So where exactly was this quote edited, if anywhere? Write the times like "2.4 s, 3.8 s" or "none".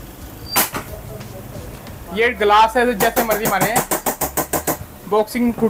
2.0 s